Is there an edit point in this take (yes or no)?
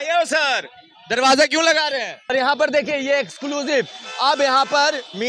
yes